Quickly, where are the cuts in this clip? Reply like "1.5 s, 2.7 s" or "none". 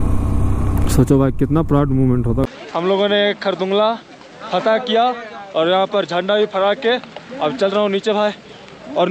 2.5 s